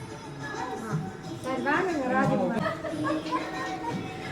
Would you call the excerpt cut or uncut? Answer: cut